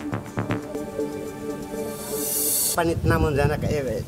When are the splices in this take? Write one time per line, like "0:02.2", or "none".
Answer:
none